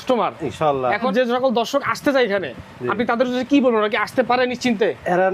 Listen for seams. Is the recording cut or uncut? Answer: cut